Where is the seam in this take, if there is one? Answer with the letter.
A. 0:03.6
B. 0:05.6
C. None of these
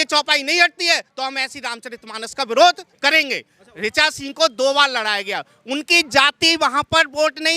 A